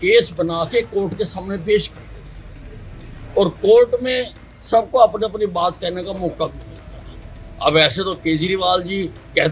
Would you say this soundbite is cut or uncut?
uncut